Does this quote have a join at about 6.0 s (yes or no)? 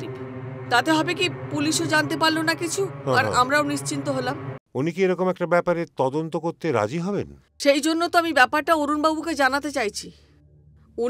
no